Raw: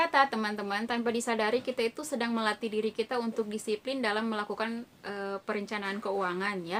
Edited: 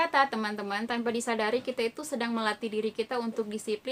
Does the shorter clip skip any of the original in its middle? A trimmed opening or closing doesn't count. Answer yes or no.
no